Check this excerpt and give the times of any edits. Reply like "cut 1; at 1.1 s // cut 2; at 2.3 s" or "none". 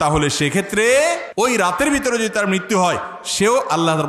cut 1; at 1.2 s

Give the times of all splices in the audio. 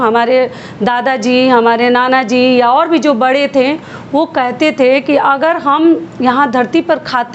none

